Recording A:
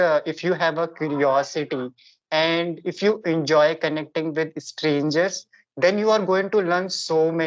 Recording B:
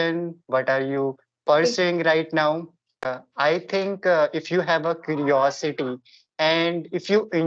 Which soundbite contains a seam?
B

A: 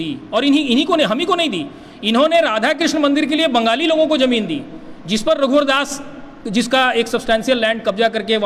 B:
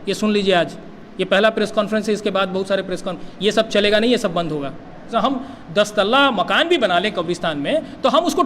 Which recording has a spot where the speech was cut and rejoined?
B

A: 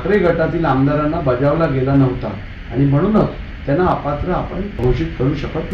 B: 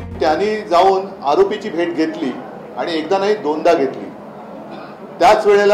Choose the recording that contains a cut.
A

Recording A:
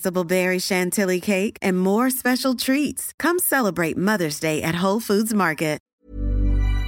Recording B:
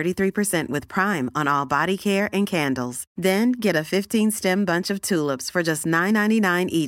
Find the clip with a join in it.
A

